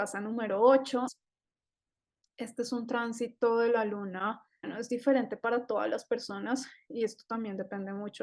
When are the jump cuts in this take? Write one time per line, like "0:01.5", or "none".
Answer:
0:01.1
0:04.7